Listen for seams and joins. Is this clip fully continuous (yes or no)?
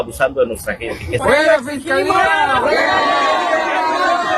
no